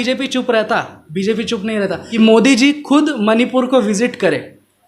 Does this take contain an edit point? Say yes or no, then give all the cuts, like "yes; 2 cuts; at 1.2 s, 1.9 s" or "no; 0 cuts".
yes; 1 cut; at 2.0 s